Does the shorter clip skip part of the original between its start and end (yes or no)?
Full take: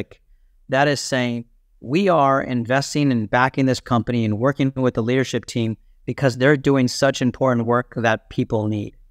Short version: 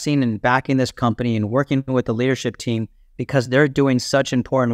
no